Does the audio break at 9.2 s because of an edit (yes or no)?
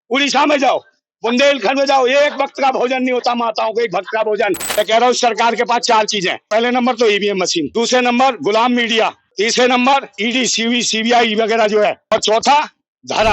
yes